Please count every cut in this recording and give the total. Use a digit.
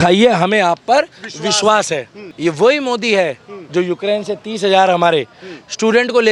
1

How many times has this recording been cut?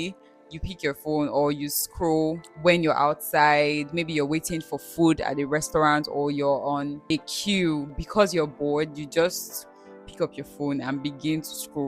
3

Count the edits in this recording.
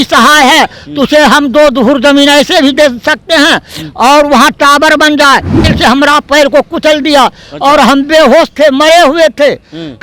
1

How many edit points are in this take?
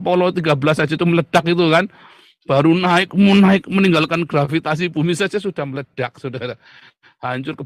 1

